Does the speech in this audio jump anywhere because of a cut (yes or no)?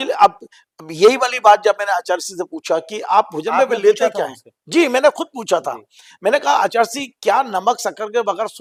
no